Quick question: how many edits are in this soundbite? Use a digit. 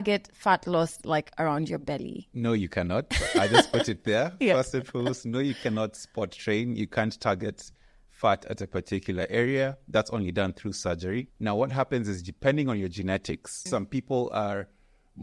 3